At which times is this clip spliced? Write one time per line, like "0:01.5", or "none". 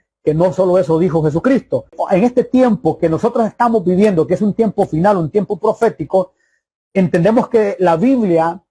0:02.0